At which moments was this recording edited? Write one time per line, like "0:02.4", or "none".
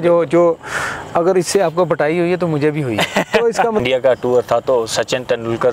0:03.8